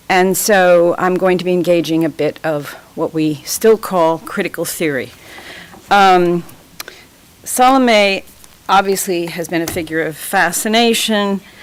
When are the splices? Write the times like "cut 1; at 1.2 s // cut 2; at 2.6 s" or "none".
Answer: none